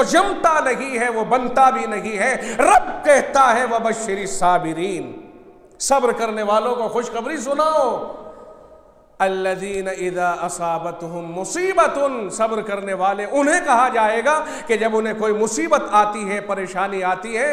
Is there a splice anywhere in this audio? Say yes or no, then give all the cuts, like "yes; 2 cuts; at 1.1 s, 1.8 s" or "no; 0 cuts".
no; 0 cuts